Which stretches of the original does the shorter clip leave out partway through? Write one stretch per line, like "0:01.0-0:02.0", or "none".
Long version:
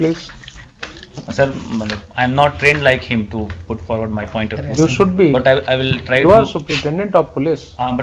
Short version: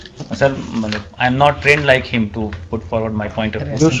none